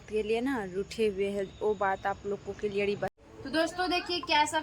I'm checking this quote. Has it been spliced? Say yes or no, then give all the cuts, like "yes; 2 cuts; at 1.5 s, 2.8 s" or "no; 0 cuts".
yes; 1 cut; at 3.1 s